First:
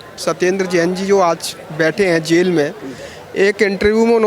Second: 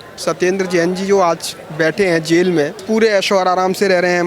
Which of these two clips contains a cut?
second; 1 cut; at 2.8 s

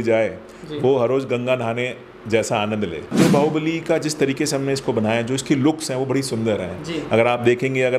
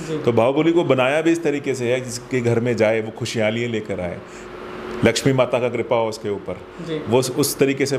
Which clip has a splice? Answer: first; 1 cut; at 3.1 s

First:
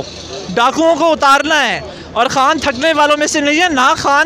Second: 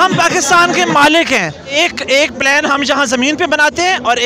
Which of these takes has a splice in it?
second; 1 cut; at 1.8 s

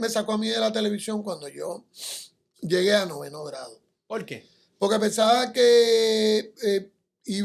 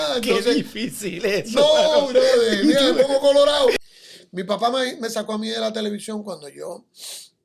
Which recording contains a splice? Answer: second; 1 cut; at 3.8 s

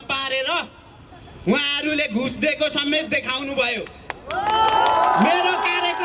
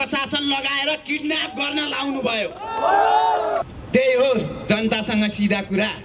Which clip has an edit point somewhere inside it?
second; 1 cut; at 3.6 s

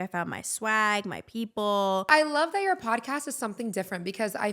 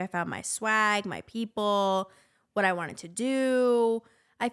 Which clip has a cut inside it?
first; 1 cut; at 2.1 s

